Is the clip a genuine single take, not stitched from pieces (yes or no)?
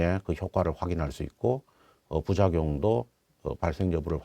yes